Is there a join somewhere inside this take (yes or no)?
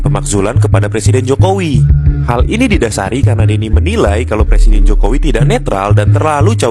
no